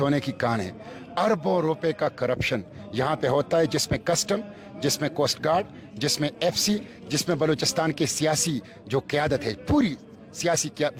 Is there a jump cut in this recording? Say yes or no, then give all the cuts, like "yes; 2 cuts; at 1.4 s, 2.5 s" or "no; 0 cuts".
no; 0 cuts